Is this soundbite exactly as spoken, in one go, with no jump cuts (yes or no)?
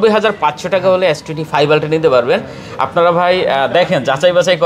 yes